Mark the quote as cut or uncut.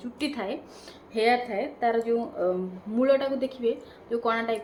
uncut